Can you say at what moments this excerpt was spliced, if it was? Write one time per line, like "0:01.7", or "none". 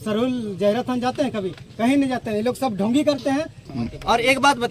0:03.6